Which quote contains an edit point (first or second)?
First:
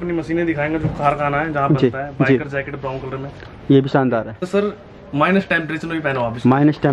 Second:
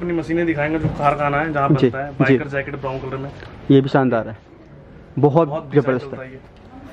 first